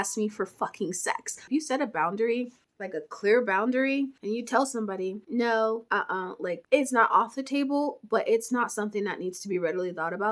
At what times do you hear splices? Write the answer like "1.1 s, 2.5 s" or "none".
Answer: 1.4 s